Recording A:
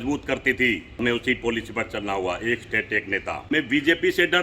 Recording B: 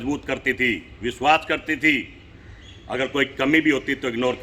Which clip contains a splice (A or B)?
A